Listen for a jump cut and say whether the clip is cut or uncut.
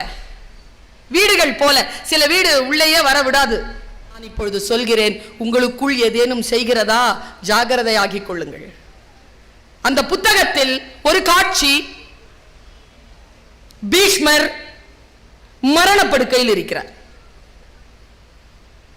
cut